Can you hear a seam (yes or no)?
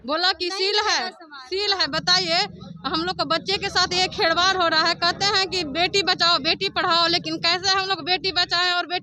no